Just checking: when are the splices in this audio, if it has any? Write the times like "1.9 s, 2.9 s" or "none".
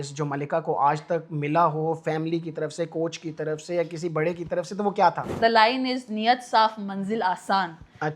5.3 s